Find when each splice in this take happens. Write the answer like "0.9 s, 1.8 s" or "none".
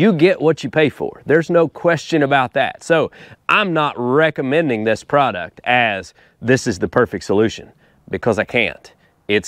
none